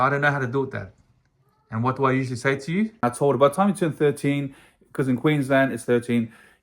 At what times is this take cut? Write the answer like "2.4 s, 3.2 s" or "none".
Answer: 2.9 s